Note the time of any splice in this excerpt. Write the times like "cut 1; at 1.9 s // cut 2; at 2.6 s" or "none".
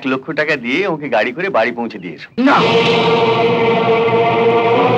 cut 1; at 2.2 s